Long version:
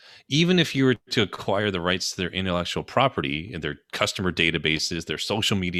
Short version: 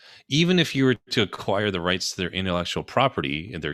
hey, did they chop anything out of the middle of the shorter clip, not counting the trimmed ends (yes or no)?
no